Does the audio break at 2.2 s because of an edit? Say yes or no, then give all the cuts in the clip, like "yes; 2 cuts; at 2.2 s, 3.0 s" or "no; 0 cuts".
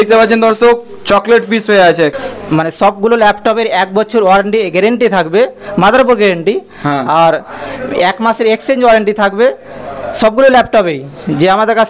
yes; 1 cut; at 2.2 s